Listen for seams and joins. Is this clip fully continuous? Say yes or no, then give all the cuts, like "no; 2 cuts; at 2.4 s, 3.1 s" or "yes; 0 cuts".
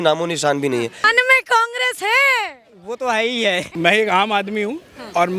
no; 2 cuts; at 1.1 s, 3.7 s